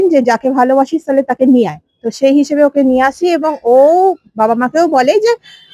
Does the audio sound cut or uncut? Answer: uncut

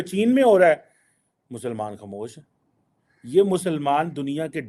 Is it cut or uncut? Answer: uncut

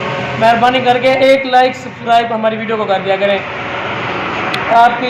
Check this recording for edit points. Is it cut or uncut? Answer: uncut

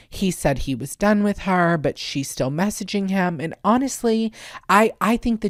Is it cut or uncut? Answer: uncut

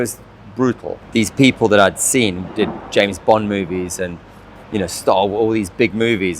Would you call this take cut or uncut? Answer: cut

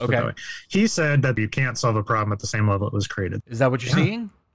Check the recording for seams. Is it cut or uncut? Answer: cut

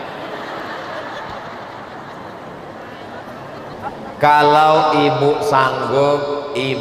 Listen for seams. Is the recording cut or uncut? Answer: cut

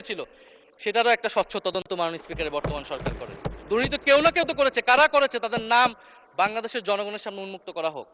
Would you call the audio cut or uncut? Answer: uncut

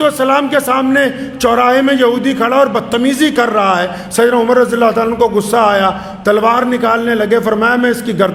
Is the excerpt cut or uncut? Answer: uncut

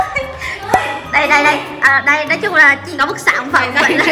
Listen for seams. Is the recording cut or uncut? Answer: cut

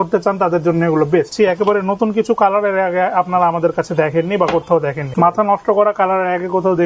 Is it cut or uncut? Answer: cut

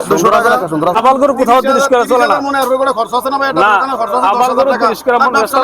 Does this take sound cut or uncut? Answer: cut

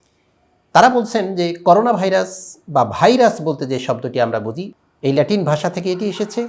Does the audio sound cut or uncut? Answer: cut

